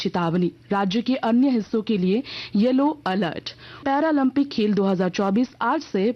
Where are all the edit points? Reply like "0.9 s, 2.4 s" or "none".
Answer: 3.6 s